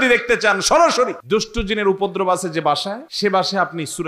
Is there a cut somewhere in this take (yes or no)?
yes